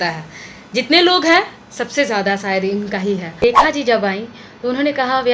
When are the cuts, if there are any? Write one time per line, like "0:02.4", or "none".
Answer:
0:03.4